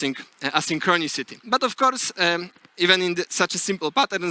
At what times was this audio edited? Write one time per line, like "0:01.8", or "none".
0:01.3